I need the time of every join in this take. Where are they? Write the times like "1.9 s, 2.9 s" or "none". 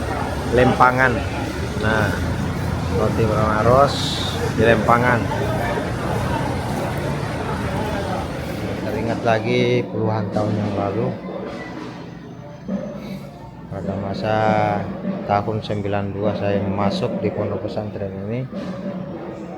8.6 s